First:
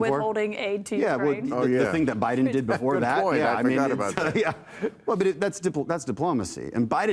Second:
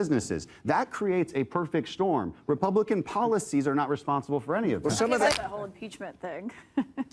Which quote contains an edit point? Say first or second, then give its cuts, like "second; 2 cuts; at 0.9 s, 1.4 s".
second; 1 cut; at 5.3 s